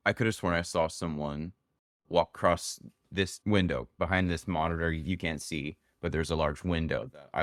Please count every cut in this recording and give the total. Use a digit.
0